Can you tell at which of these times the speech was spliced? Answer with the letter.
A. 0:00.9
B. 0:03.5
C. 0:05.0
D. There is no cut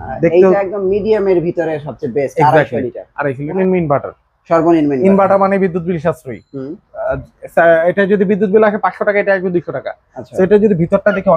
B